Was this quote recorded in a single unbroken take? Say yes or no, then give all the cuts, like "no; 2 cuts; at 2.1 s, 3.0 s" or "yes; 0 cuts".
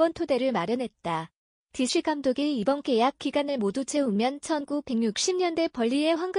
no; 1 cut; at 1.0 s